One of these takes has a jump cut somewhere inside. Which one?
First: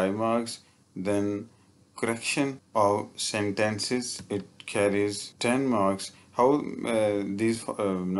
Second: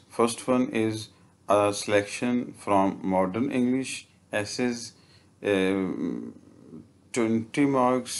first; 3 cuts; at 2.6 s, 4.2 s, 5.3 s

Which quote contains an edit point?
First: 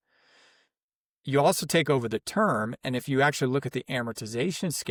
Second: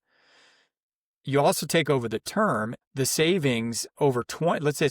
second; 1 cut; at 2.8 s

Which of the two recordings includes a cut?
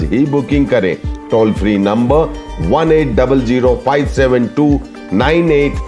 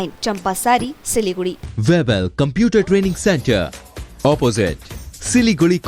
second; 1 cut; at 1.6 s

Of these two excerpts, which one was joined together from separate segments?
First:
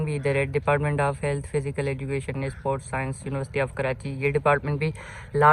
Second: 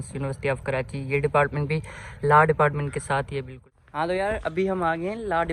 second; 1 cut; at 3.8 s

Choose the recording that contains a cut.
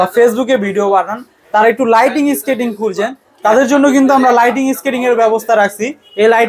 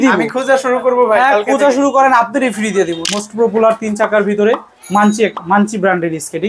second; 1 cut; at 3.0 s

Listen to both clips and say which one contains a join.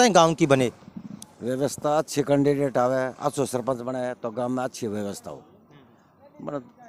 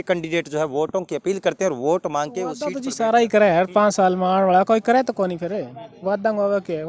second; 1 cut; at 2.7 s

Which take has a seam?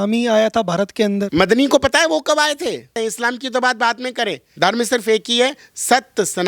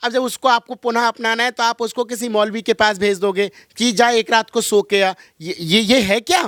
first; 2 cuts; at 1.3 s, 2.9 s

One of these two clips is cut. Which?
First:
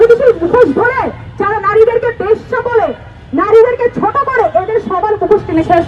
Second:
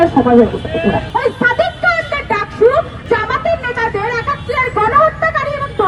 second; 2 cuts; at 1.1 s, 3.0 s

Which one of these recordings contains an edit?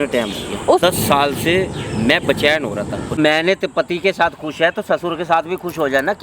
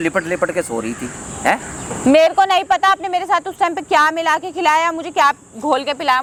first; 2 cuts; at 0.8 s, 3.2 s

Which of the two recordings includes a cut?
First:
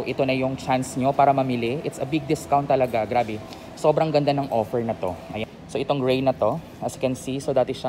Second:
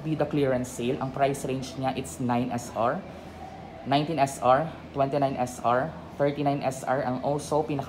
first; 1 cut; at 5.4 s

